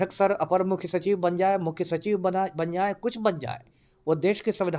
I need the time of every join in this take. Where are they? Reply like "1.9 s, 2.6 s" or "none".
none